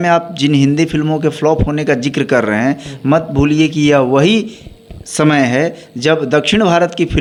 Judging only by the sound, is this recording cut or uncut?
uncut